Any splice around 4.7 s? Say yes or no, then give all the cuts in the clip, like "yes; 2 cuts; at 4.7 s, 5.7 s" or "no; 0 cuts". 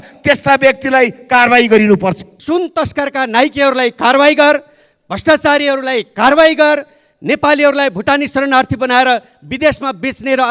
no; 1 cut; at 2.4 s